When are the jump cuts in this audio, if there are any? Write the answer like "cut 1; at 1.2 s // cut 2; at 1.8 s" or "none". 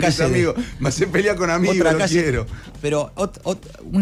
none